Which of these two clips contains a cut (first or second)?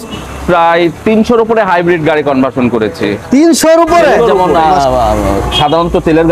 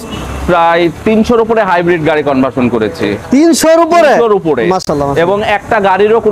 first